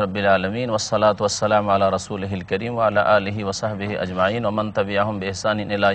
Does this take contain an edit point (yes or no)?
no